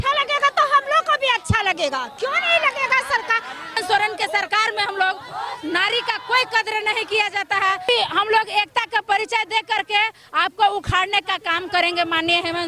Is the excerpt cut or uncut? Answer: cut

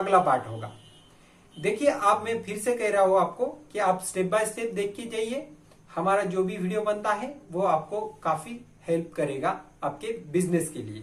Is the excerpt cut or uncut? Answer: uncut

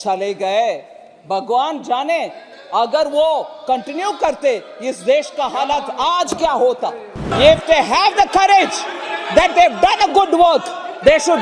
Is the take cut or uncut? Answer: cut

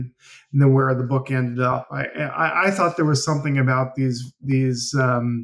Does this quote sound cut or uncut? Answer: uncut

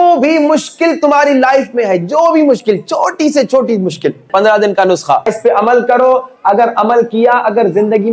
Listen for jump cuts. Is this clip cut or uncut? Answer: cut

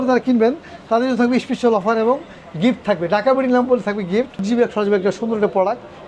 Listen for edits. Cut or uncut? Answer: cut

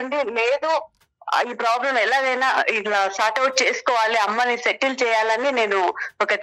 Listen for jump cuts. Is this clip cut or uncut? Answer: uncut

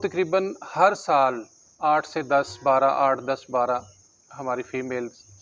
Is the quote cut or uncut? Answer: uncut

